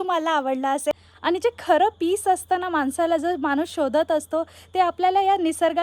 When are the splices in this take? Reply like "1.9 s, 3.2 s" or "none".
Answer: 1.1 s